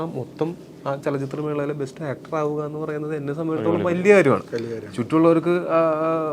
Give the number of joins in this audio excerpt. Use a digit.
0